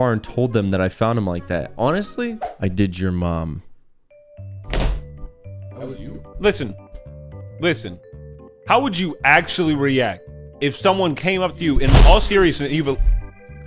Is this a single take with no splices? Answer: no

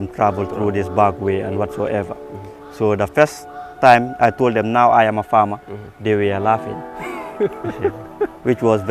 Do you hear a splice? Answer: no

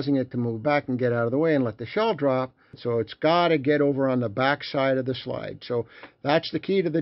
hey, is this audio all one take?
no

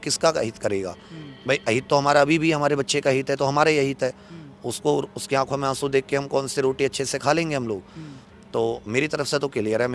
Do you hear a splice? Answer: no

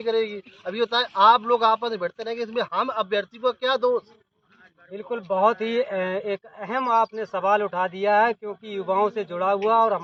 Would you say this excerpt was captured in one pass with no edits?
yes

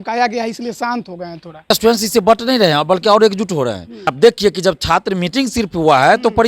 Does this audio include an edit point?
yes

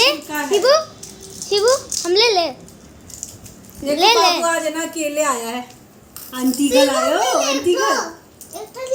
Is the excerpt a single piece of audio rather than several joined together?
yes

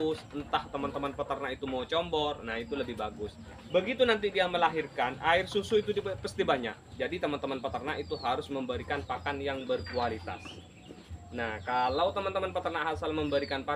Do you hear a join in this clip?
yes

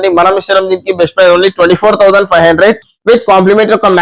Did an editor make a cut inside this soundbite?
no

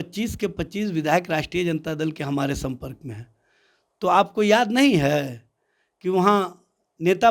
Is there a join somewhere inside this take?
no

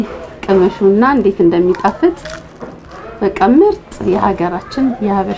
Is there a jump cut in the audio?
no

